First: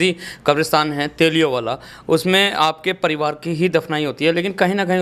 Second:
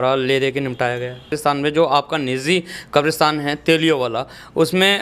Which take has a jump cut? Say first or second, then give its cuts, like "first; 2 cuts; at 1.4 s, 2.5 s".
second; 1 cut; at 1.3 s